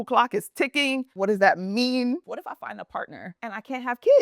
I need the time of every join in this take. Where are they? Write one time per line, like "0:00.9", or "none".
0:01.1
0:02.3
0:03.3